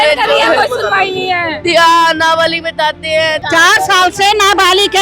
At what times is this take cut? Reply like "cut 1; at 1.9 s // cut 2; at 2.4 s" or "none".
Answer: cut 1; at 3.4 s